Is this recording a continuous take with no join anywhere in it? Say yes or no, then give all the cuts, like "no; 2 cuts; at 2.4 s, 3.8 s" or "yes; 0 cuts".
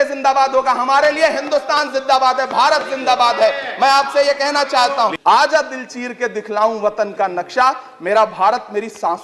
no; 1 cut; at 5.1 s